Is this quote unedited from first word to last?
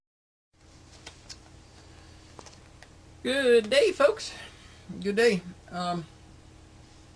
yes; 0 cuts

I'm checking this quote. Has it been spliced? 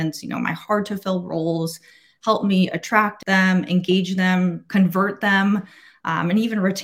yes; 2 cuts; at 3.2 s, 4.6 s

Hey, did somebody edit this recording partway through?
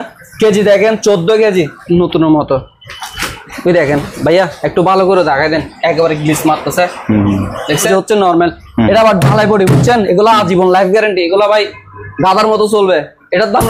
yes; 2 cuts; at 1.8 s, 7.9 s

